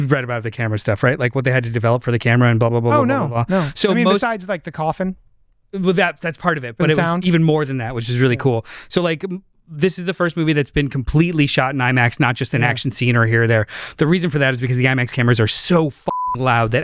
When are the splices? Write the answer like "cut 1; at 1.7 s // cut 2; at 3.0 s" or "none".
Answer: none